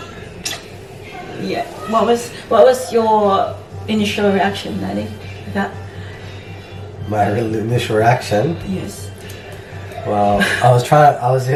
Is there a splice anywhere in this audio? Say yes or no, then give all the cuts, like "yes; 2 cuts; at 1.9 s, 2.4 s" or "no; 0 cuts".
no; 0 cuts